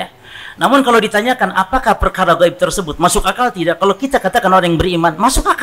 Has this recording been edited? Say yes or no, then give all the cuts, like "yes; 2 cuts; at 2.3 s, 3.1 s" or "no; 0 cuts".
no; 0 cuts